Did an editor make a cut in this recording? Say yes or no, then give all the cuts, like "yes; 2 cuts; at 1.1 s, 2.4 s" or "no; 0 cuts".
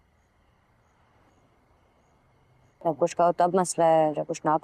yes; 1 cut; at 1.1 s